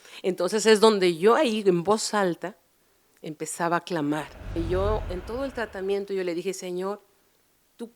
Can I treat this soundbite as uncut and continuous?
no; 1 cut; at 4.6 s

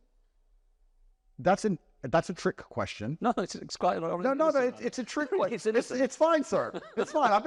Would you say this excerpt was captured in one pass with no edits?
yes; 0 cuts

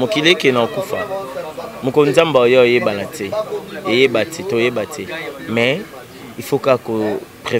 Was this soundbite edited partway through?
no; 0 cuts

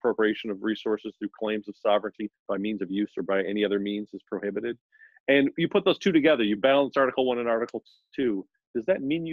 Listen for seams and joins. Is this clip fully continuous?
yes; 0 cuts

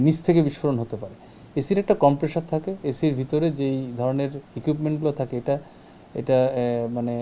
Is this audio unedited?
yes; 0 cuts

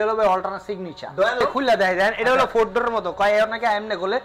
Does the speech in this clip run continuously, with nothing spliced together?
no; 1 cut; at 1.4 s

